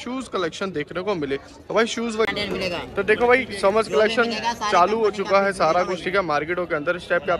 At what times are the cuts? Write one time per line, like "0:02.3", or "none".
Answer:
0:02.3